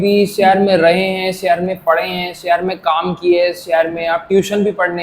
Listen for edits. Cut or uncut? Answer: uncut